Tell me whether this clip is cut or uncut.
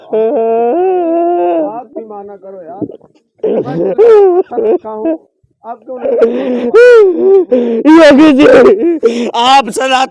uncut